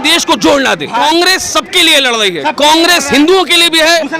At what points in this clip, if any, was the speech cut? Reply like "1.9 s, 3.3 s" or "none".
1.0 s